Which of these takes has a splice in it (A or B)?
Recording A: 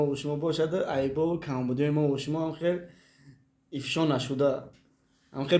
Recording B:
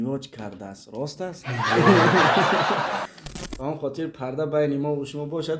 B